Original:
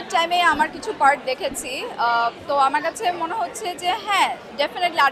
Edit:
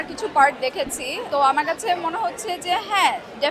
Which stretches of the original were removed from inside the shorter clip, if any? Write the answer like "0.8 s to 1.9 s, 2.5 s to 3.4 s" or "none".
1.9 s to 2.4 s